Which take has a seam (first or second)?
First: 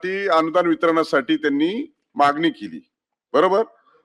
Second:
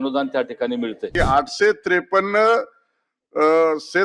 second